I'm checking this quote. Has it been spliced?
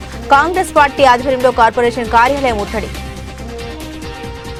no; 0 cuts

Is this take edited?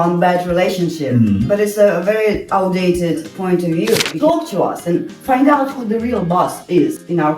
yes; 1 cut; at 4.1 s

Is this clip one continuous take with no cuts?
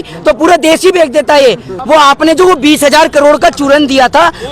no; 1 cut; at 1.8 s

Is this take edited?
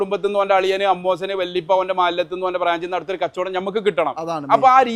no; 0 cuts

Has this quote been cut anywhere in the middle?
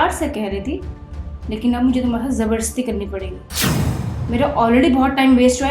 yes; 2 cuts; at 3.4 s, 4.2 s

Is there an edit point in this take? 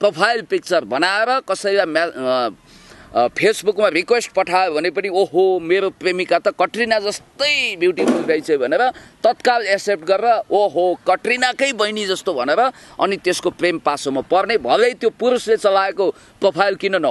no; 0 cuts

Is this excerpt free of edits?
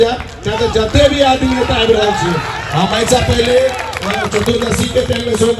yes; 0 cuts

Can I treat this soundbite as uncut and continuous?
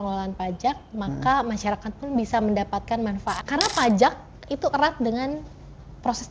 no; 1 cut; at 3.4 s

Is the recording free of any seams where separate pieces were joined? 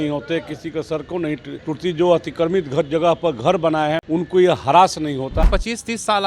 no; 3 cuts; at 1.5 s, 4.0 s, 5.5 s

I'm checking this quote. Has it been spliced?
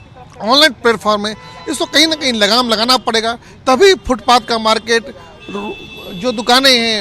no; 0 cuts

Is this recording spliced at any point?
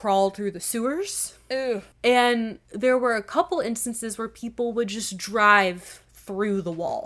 yes; 2 cuts; at 1.9 s, 2.6 s

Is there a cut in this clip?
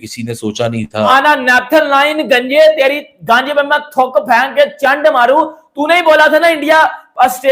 yes; 1 cut; at 1.1 s

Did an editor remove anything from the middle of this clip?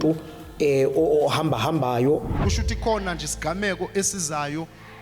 yes; 1 cut; at 2.4 s

